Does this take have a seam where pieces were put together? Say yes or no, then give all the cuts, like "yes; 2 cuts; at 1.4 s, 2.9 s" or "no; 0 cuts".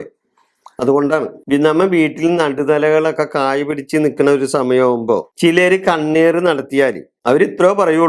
no; 0 cuts